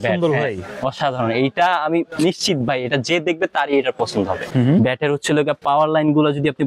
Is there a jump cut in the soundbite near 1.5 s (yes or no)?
no